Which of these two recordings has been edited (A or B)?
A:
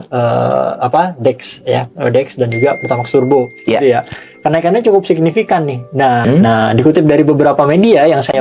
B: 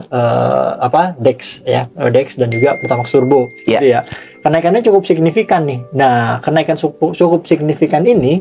A